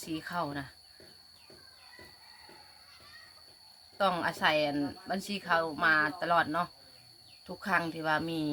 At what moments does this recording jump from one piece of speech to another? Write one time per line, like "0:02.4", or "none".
none